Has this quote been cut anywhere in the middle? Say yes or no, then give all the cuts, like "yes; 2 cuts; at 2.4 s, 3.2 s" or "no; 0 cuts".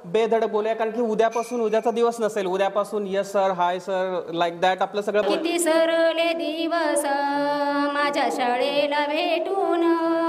yes; 1 cut; at 5.3 s